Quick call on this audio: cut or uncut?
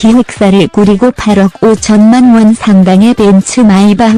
uncut